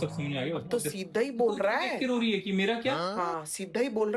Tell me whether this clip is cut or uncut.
uncut